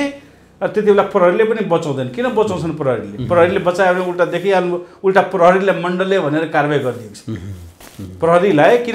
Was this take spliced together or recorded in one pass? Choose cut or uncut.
uncut